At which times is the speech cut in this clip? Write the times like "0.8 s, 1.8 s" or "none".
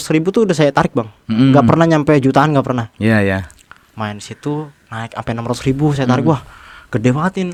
none